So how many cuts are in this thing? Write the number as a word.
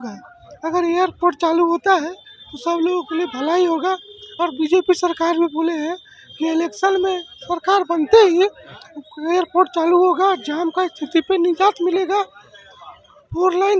zero